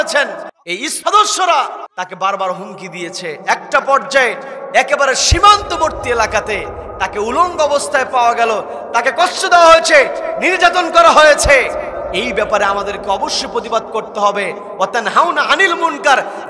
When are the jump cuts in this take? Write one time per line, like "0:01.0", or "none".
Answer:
0:01.0
0:01.8